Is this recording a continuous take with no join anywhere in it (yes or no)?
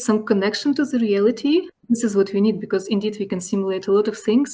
no